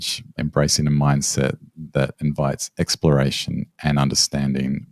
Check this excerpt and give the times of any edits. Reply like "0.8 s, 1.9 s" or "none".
none